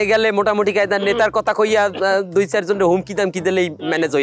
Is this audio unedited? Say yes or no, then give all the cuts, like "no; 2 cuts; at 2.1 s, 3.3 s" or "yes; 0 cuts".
yes; 0 cuts